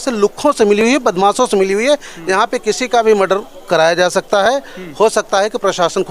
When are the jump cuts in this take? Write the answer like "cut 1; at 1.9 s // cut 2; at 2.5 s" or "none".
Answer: none